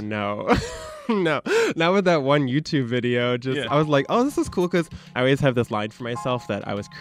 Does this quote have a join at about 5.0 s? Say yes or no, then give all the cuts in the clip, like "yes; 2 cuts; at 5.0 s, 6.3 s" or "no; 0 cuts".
yes; 1 cut; at 5.0 s